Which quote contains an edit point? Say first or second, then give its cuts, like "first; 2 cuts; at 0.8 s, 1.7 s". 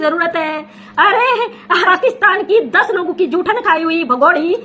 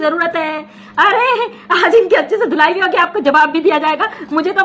first; 1 cut; at 1.8 s